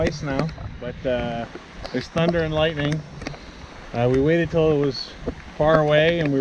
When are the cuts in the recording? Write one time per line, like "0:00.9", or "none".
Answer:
none